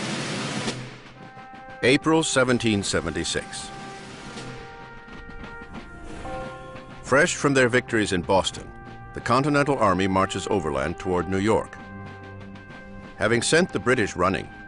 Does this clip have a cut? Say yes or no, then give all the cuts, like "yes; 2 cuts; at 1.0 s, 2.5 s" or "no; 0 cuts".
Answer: yes; 1 cut; at 8.3 s